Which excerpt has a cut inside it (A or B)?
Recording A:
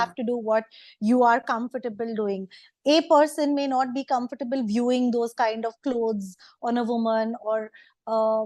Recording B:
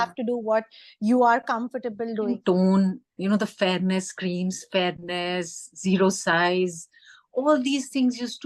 B